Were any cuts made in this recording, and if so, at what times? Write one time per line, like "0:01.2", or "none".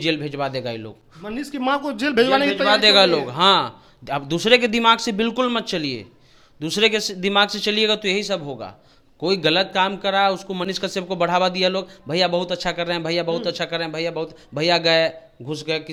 none